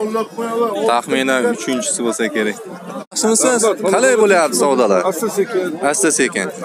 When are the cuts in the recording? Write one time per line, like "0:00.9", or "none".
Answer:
0:03.2